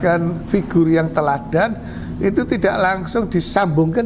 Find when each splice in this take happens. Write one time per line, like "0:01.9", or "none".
none